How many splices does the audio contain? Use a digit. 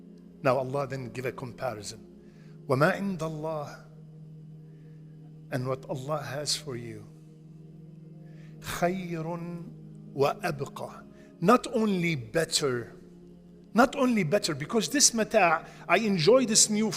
2